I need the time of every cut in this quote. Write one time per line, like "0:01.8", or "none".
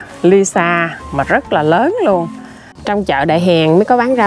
0:02.7